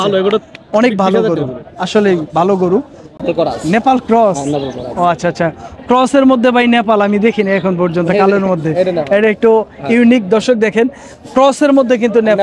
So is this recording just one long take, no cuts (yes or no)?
no